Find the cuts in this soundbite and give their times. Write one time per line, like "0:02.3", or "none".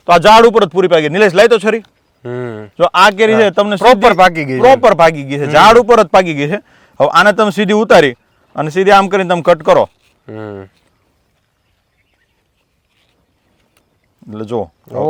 none